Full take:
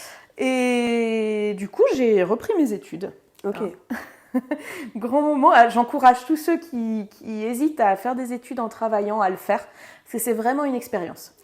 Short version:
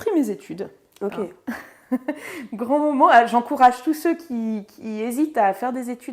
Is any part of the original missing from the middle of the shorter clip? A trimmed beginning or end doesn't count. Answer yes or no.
no